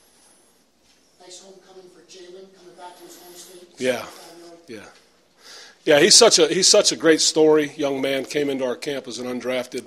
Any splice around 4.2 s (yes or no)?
yes